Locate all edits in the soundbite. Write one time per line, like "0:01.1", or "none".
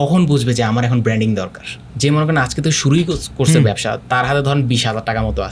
0:01.8

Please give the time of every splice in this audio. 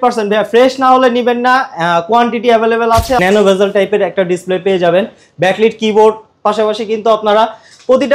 0:03.2

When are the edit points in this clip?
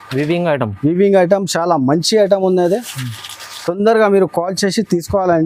none

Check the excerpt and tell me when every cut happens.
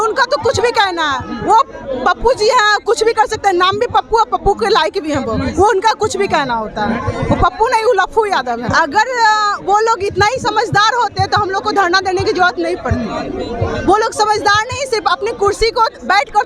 0:08.6

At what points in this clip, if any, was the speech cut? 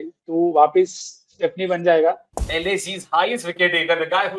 0:02.5

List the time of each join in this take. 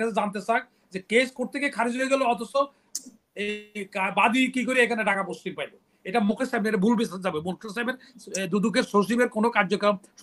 none

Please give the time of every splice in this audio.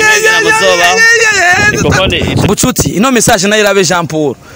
0:02.5

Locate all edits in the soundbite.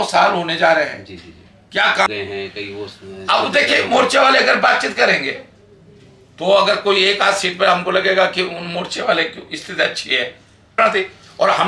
0:02.1
0:10.8

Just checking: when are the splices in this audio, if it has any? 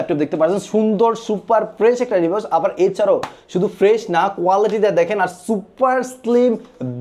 none

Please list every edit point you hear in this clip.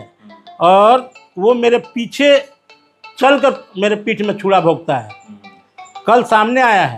none

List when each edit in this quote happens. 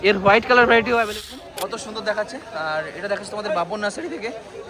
0:01.1

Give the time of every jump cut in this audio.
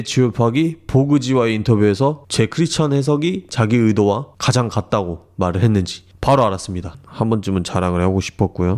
none

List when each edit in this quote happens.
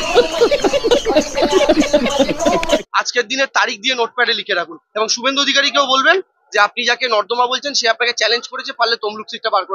0:02.8
0:08.6

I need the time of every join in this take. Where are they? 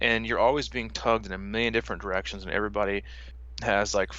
0:03.2

